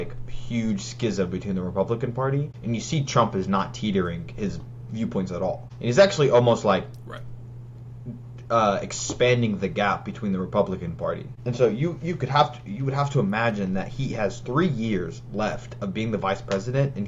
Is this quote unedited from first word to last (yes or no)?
no